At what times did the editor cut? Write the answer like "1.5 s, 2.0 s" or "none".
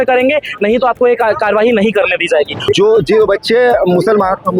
2.6 s